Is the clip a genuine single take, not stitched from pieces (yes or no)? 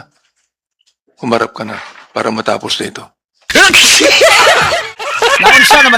no